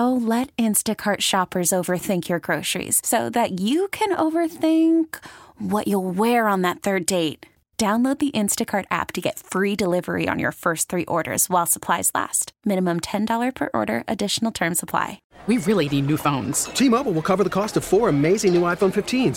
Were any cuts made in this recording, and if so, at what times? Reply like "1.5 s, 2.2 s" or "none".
15.3 s